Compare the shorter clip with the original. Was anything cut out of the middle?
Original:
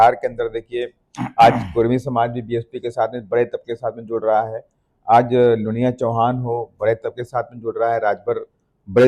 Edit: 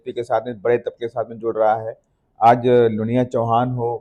no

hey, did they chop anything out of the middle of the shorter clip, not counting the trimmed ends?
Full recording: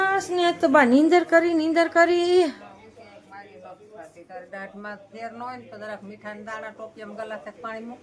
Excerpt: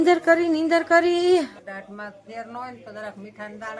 yes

